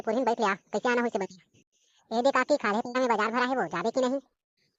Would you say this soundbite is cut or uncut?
uncut